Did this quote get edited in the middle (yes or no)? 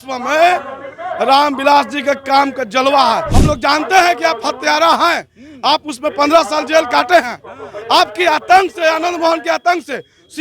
yes